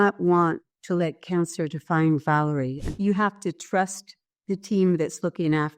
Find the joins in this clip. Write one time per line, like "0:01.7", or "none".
0:02.8